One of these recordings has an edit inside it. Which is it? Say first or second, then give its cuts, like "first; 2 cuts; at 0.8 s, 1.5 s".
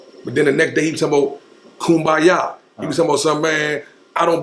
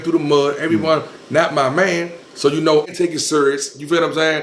second; 1 cut; at 2.9 s